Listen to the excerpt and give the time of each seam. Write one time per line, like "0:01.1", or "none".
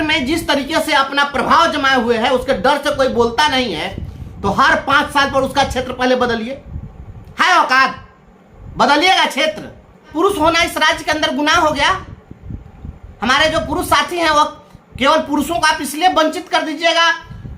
0:10.1